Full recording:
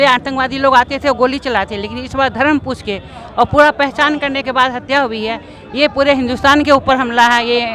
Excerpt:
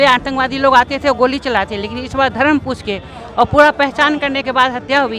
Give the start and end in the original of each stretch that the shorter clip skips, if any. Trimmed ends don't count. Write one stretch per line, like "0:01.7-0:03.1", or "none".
none